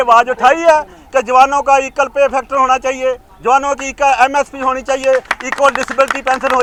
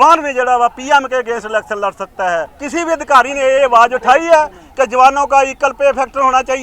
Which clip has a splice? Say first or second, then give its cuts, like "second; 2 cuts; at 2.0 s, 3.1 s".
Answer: second; 1 cut; at 2.6 s